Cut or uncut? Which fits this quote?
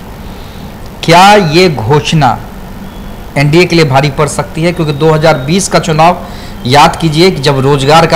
uncut